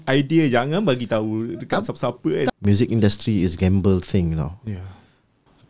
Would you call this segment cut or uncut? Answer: cut